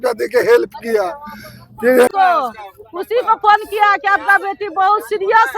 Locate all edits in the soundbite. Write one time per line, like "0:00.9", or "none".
0:02.1

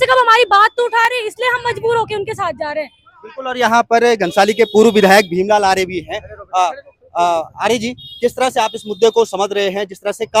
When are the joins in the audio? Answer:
none

